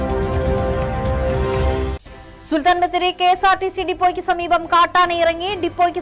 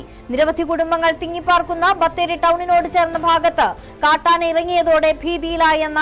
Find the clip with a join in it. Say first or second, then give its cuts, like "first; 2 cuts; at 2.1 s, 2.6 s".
first; 1 cut; at 2.0 s